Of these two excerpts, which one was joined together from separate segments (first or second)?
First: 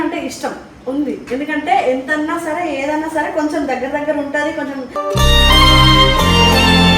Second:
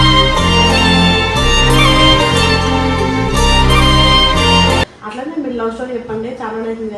second